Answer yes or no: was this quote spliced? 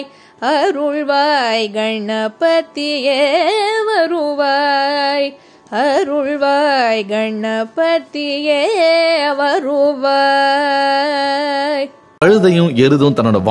yes